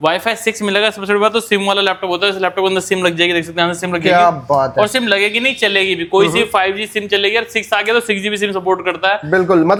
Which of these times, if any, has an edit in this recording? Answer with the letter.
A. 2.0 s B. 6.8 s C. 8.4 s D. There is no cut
D